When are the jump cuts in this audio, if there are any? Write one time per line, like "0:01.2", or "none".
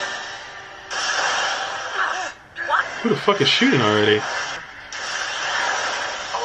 0:02.8